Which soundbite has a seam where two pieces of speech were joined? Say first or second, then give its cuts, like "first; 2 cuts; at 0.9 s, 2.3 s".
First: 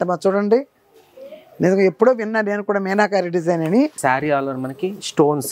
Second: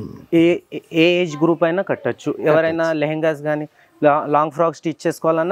first; 1 cut; at 4.0 s